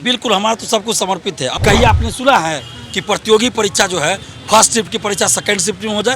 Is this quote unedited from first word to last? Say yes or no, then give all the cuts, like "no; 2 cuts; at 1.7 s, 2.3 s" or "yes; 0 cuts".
no; 1 cut; at 1.6 s